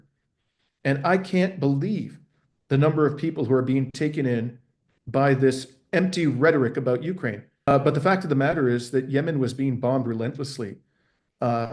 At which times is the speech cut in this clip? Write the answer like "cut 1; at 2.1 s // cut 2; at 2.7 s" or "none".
cut 1; at 7.7 s